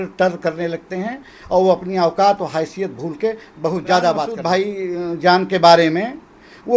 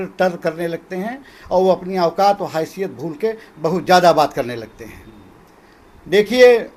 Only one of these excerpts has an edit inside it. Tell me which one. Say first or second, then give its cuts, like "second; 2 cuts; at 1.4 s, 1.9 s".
first; 1 cut; at 4.3 s